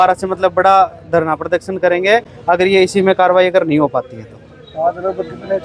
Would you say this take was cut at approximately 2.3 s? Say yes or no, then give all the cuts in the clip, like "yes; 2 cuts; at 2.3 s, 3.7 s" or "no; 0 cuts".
no; 0 cuts